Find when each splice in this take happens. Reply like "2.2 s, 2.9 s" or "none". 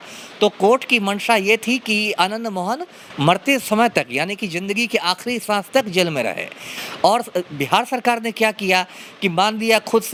none

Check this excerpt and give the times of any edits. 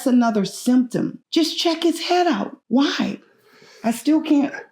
1.2 s, 2.6 s

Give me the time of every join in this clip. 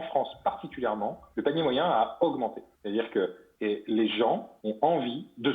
1.2 s, 2.7 s, 3.4 s, 4.6 s

